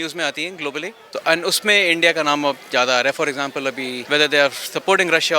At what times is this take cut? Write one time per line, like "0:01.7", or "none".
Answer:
0:01.0
0:04.0